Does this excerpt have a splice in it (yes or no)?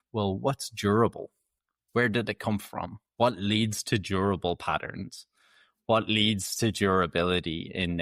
no